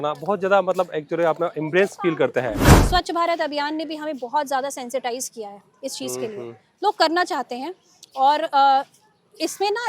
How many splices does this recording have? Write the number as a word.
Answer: one